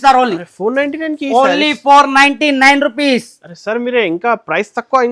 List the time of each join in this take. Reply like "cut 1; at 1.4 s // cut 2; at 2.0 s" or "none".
none